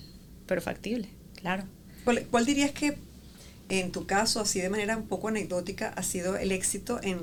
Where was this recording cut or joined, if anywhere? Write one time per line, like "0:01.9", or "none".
none